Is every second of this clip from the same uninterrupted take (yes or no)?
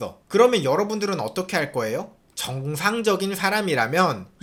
yes